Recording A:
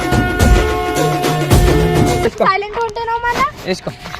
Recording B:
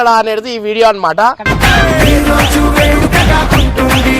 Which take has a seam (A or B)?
A